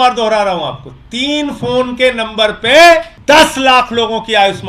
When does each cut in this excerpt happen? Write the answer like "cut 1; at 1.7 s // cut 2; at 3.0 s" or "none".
cut 1; at 3.1 s